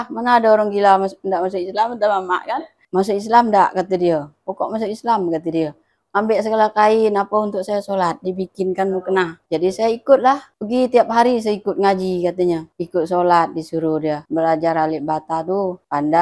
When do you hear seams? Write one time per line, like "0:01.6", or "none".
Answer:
0:02.8